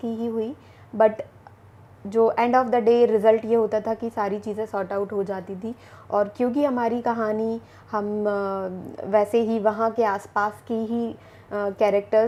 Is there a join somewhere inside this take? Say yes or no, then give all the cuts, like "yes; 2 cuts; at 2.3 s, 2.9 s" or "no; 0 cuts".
no; 0 cuts